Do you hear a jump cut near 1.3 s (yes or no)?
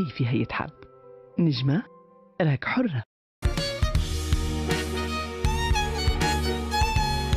no